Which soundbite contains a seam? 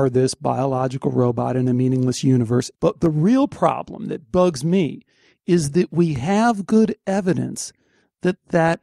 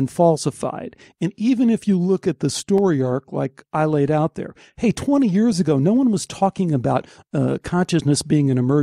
first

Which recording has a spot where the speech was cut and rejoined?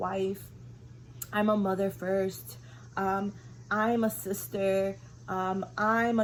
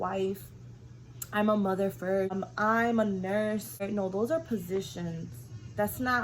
second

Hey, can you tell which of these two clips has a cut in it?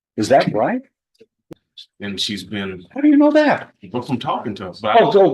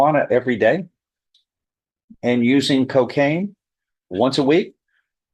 first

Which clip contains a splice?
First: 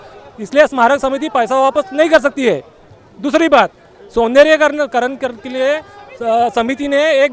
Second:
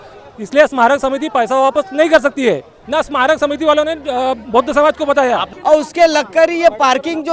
second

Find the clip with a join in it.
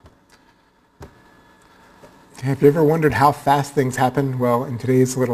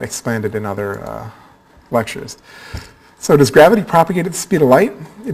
first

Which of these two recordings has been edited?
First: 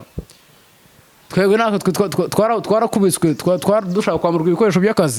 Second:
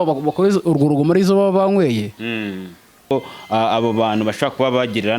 second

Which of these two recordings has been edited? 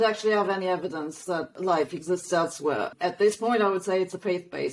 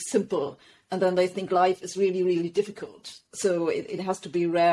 first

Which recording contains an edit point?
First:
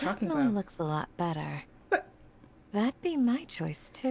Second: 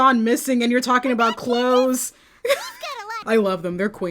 second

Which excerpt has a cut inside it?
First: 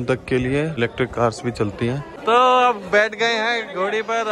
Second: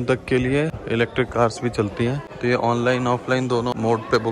first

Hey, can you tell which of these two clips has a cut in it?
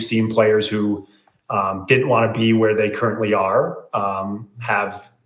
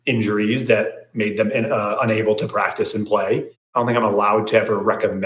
second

